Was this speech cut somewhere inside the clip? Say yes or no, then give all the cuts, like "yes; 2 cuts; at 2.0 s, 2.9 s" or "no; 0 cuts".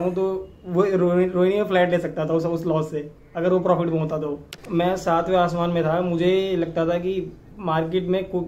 yes; 1 cut; at 4.5 s